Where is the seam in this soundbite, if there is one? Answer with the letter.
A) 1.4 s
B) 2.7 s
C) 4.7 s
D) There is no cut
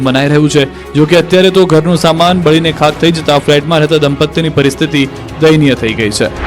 D